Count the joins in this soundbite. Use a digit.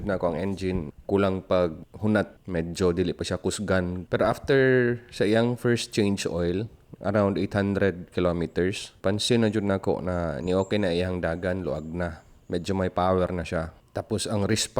3